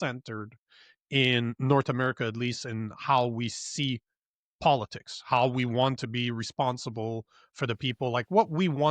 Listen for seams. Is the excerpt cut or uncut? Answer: uncut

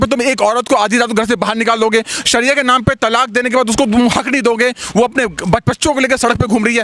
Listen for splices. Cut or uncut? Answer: uncut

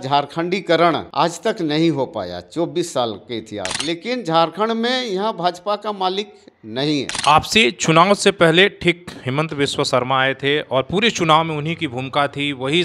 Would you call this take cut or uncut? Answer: cut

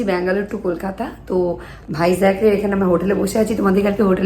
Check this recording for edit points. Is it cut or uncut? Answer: uncut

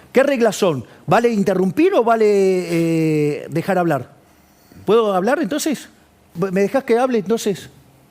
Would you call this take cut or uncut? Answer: cut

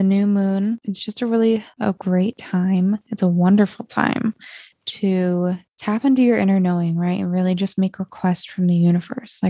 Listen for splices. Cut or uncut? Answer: cut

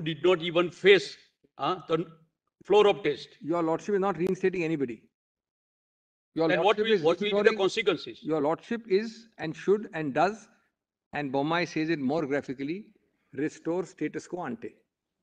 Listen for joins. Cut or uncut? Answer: uncut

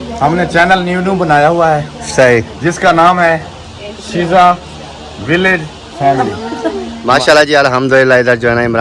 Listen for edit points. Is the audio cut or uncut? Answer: cut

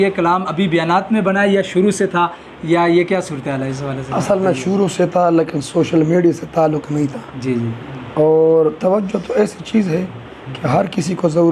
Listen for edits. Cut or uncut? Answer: uncut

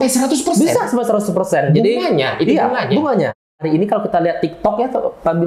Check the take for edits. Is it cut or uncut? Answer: cut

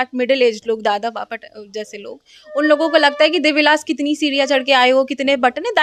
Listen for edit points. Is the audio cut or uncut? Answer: uncut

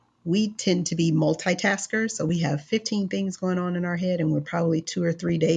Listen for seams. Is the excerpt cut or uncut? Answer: uncut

